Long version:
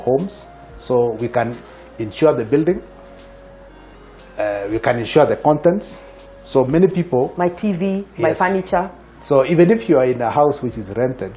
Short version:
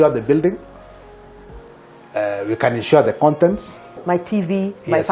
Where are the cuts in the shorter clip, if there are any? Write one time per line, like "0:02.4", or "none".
0:04.0